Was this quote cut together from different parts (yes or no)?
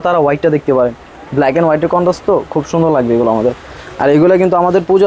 no